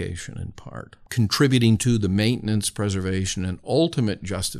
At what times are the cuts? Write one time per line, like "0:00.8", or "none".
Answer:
0:01.0

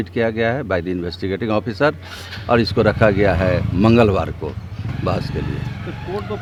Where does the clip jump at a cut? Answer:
none

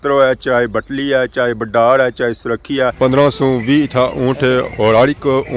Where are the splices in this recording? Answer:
0:02.9

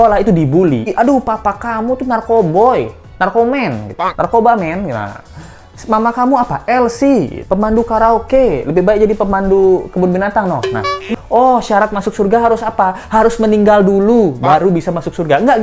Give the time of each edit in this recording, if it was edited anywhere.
0:00.9
0:11.1

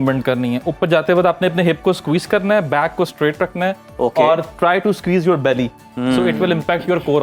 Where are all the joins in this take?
none

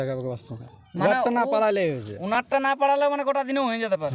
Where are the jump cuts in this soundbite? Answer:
none

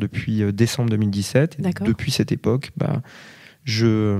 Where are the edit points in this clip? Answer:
none

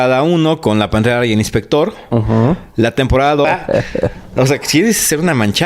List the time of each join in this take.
0:03.4

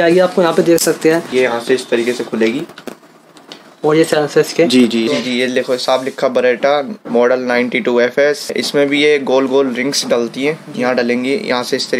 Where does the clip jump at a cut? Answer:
0:01.3
0:05.1

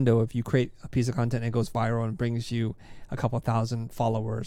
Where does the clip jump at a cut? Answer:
none

